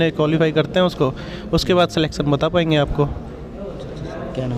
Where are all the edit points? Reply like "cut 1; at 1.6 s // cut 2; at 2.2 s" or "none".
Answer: none